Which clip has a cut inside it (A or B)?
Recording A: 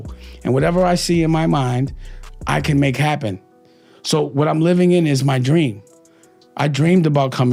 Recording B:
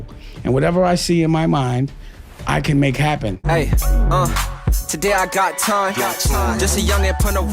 B